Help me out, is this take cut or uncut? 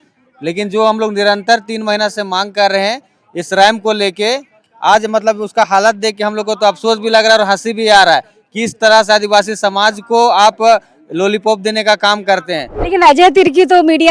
cut